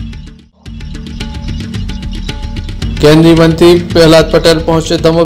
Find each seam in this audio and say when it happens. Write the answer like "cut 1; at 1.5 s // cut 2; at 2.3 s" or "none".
cut 1; at 1.0 s